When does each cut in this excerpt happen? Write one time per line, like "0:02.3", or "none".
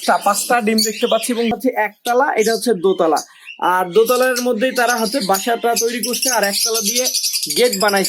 0:01.5